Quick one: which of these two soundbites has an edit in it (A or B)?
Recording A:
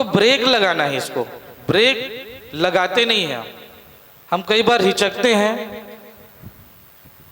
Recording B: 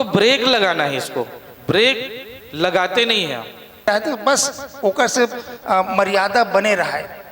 B